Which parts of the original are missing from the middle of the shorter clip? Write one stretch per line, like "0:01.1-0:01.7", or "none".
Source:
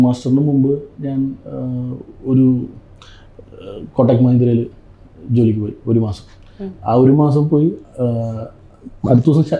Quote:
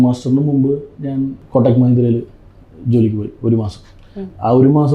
0:01.4-0:03.8